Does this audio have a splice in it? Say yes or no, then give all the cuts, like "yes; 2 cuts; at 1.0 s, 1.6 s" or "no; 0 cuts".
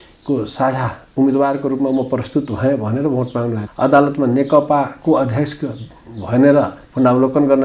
yes; 1 cut; at 3.7 s